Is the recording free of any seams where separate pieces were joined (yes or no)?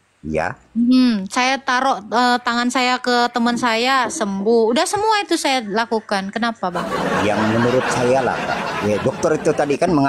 yes